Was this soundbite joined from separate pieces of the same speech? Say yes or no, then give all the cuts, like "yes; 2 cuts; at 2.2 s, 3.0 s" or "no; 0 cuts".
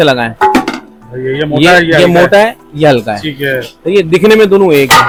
no; 0 cuts